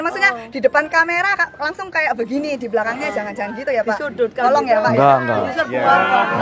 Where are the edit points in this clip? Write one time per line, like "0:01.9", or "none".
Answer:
none

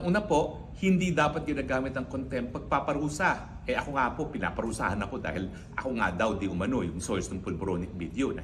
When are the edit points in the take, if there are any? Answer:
none

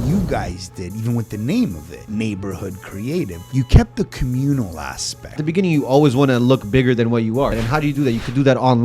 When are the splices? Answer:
0:01.9
0:03.4
0:05.4
0:07.6

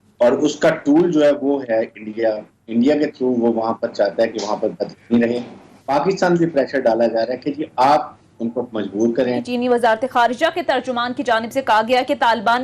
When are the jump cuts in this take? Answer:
0:05.8
0:09.5

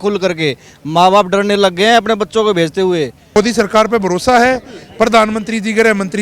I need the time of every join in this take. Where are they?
0:03.4

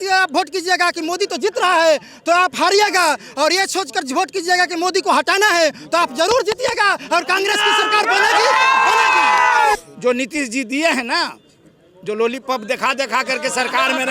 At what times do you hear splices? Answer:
0:09.8

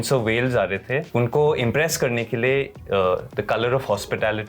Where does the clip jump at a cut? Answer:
0:01.1

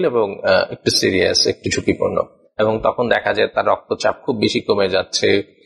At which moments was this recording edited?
0:02.4

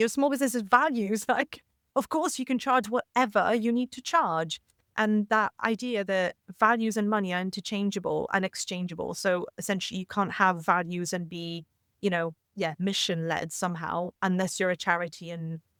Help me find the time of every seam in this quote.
none

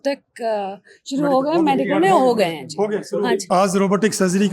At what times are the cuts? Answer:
0:03.4

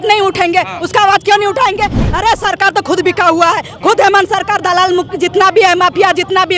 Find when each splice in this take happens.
0:02.0

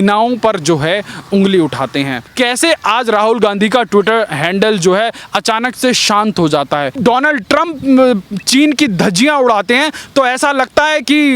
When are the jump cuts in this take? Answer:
0:02.3
0:06.9

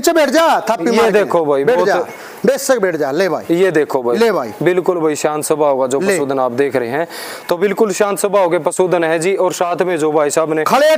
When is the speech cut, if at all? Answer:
none

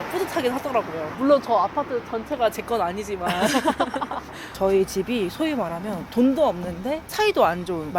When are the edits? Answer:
0:04.4

